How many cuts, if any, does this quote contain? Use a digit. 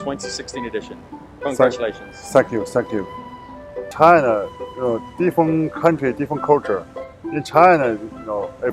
0